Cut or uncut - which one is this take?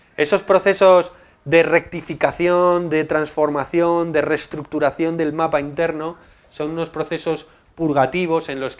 cut